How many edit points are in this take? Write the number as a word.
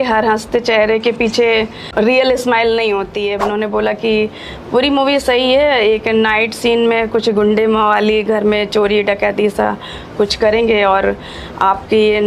one